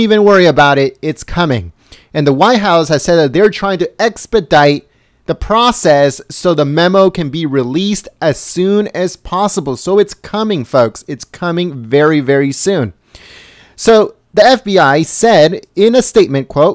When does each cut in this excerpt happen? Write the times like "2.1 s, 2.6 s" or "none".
3.1 s